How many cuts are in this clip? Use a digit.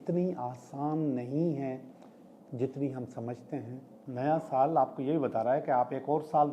1